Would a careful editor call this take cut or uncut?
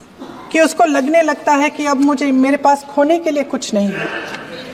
uncut